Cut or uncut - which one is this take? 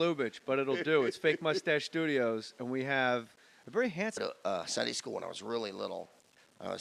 uncut